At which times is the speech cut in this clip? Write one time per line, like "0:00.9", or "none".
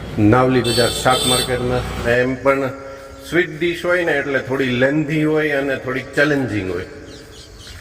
0:02.0